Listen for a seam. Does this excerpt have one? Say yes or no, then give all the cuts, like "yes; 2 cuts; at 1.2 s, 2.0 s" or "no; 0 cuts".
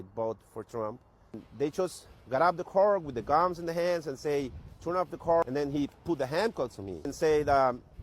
yes; 3 cuts; at 1.4 s, 5.4 s, 7.1 s